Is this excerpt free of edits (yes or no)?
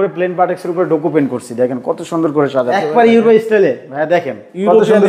no